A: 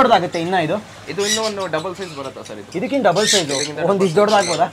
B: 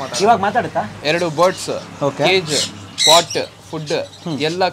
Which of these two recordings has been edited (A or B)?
B